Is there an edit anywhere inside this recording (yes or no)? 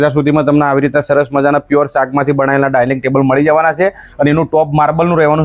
no